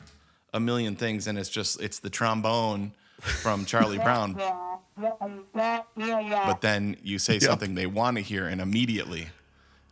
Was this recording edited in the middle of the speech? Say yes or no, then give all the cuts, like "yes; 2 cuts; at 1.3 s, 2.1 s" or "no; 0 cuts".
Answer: yes; 2 cuts; at 4.3 s, 6.5 s